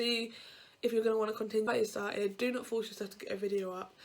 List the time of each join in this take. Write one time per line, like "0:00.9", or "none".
0:01.7